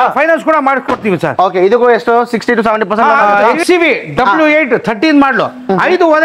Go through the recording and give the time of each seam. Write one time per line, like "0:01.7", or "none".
0:03.2